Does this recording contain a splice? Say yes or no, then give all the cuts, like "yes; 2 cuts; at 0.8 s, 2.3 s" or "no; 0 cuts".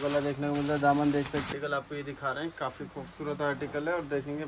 yes; 1 cut; at 1.5 s